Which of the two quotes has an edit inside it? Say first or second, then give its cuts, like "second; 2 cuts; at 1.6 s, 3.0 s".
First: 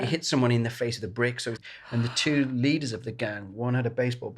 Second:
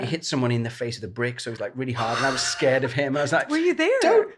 first; 1 cut; at 1.5 s